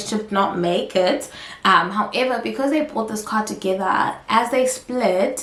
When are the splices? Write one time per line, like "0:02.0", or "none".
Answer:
none